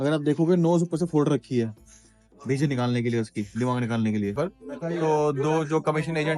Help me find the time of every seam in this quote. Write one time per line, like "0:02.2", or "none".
0:04.3